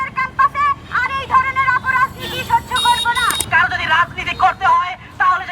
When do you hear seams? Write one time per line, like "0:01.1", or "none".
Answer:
0:03.4